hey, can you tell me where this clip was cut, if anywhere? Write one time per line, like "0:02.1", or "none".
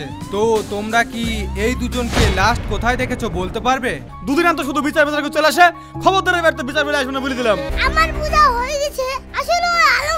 0:04.1
0:07.7